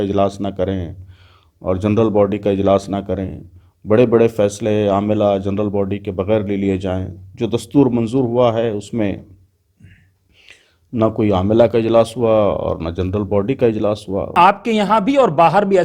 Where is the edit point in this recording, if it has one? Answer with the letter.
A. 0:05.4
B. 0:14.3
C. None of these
B